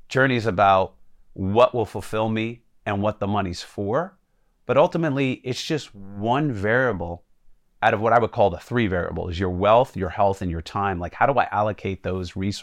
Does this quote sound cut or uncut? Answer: uncut